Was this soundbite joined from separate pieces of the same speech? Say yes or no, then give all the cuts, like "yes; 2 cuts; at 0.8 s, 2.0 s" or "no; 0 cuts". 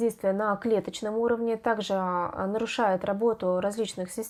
no; 0 cuts